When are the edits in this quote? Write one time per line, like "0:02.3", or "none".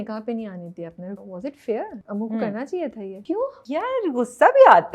0:01.2
0:02.0
0:03.2